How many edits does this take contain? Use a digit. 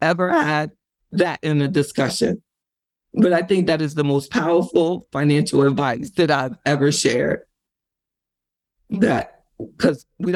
0